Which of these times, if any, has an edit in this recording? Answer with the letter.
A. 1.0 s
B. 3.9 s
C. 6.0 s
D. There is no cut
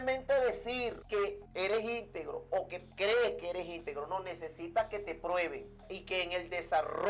A